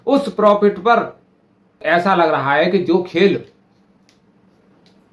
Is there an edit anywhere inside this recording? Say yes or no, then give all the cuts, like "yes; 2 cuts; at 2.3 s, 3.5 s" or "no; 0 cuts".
yes; 1 cut; at 1.8 s